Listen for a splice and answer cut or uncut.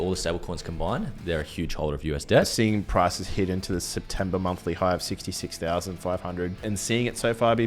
cut